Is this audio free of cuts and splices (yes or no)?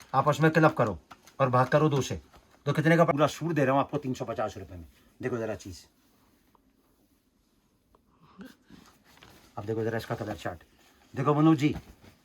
no